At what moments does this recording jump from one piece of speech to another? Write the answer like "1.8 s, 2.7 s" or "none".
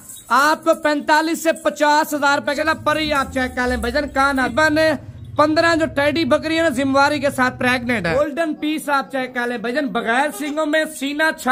2.6 s, 4.5 s, 8.1 s